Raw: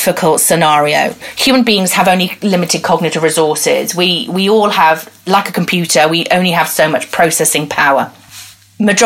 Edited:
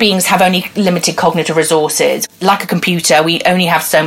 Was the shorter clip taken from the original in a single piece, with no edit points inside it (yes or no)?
no